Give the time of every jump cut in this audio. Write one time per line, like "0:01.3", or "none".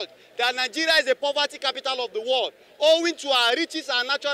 none